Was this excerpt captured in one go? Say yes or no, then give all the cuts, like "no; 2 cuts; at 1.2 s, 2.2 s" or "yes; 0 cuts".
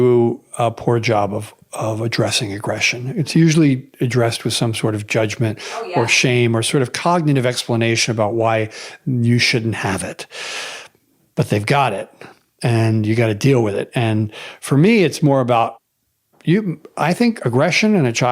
no; 1 cut; at 15.8 s